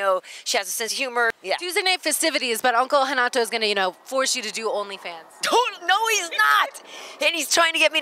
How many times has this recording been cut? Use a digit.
1